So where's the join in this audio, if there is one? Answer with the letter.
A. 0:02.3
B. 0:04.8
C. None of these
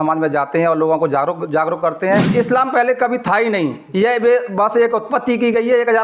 A